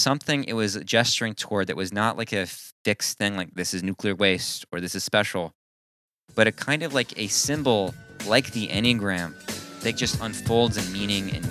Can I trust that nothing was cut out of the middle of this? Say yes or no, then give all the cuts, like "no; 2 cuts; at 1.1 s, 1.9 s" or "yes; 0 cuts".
yes; 0 cuts